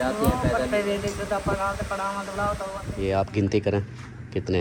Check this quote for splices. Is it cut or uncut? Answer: cut